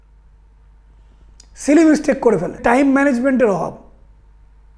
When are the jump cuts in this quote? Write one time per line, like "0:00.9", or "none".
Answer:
0:02.6